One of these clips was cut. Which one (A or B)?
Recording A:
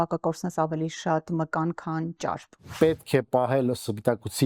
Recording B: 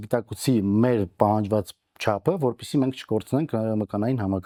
A